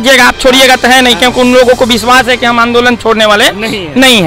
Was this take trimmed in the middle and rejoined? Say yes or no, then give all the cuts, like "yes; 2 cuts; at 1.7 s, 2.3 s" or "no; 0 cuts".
no; 0 cuts